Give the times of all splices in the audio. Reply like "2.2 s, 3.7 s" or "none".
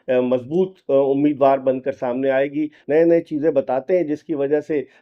2.8 s